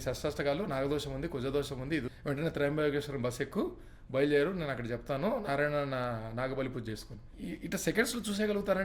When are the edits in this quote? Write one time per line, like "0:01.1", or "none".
0:02.1
0:07.3